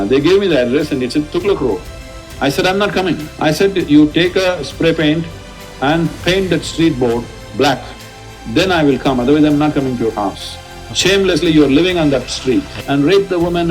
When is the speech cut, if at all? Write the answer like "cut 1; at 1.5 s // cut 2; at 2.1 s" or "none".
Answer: cut 1; at 3.3 s // cut 2; at 12.8 s

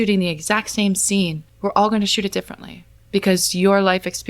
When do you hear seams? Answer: cut 1; at 1.4 s

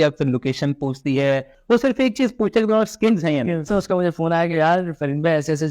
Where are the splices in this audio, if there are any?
cut 1; at 1.6 s // cut 2; at 3.7 s

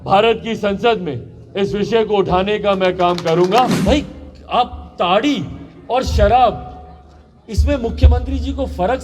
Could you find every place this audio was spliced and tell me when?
cut 1; at 3.8 s

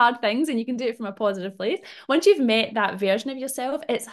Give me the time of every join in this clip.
none

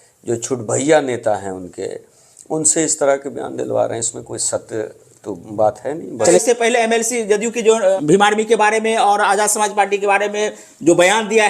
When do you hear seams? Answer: cut 1; at 6.4 s // cut 2; at 8.0 s

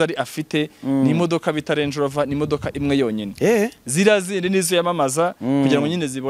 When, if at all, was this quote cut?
none

